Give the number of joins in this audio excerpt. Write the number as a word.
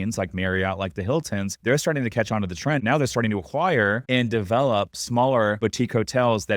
four